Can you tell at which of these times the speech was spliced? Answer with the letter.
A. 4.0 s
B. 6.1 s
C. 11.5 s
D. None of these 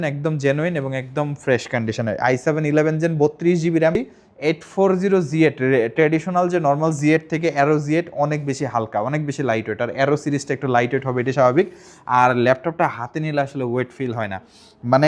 A